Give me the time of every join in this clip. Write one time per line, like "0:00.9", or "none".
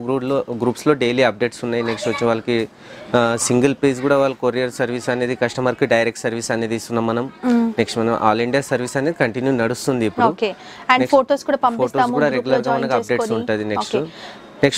none